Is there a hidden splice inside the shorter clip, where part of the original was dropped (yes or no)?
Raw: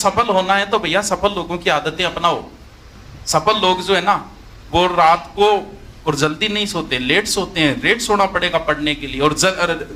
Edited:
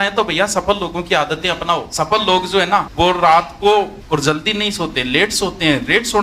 yes